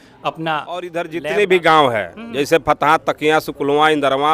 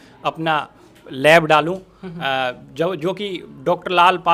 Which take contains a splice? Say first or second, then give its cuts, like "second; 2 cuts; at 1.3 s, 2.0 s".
first; 1 cut; at 1.0 s